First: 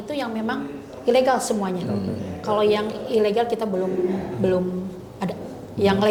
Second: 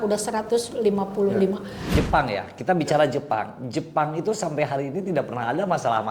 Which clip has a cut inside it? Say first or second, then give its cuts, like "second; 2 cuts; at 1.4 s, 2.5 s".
second; 1 cut; at 1.8 s